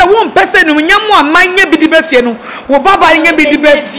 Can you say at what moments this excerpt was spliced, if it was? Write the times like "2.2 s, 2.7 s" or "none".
none